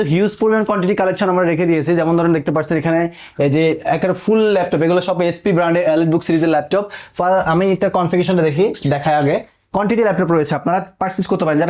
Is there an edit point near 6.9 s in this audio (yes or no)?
no